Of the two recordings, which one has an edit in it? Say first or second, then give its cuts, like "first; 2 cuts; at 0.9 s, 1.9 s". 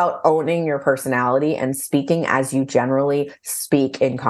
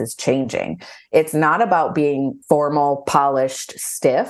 second; 1 cut; at 2.4 s